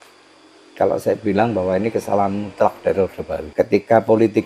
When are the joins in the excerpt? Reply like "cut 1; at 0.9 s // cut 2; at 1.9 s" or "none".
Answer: cut 1; at 3.5 s